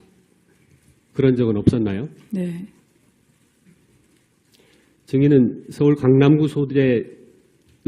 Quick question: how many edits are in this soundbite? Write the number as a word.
one